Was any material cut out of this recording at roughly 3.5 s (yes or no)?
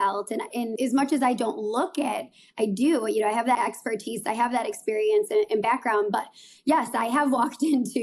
yes